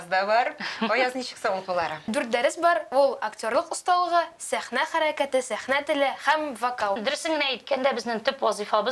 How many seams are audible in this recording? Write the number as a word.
two